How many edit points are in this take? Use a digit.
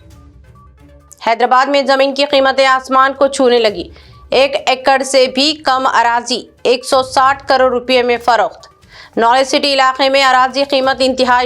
1